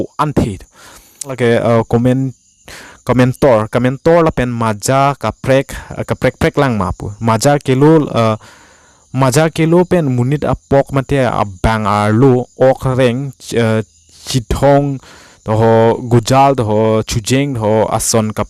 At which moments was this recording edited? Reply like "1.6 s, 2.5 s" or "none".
1.3 s